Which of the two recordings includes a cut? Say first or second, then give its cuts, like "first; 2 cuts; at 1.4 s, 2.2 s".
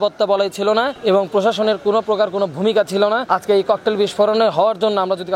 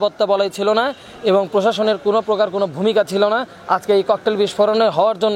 first; 2 cuts; at 0.9 s, 3.2 s